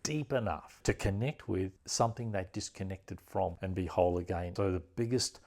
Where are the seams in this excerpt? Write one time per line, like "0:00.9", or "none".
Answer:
0:01.8
0:03.6
0:04.5